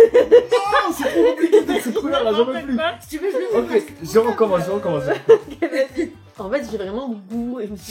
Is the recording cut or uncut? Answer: uncut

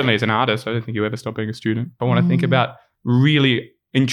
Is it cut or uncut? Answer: cut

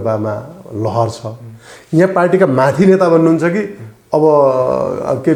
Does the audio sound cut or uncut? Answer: uncut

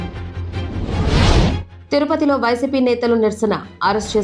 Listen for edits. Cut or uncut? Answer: cut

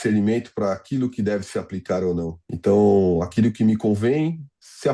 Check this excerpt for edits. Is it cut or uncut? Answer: cut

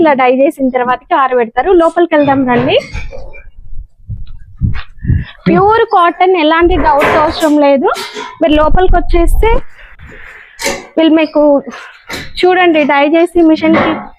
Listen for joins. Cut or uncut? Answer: uncut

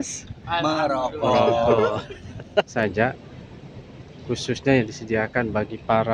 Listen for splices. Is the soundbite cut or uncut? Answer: cut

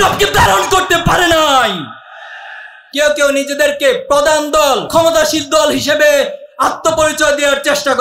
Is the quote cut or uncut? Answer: cut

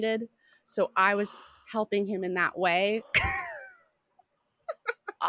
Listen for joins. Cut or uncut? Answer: uncut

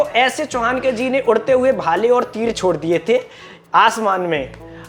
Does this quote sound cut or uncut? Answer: uncut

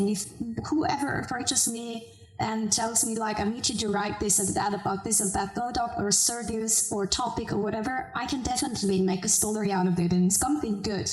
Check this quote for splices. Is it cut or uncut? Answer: uncut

